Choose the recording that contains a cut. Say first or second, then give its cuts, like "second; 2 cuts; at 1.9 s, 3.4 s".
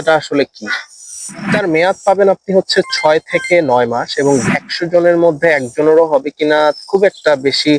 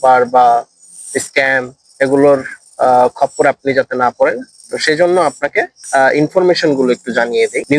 first; 2 cuts; at 1.5 s, 4.5 s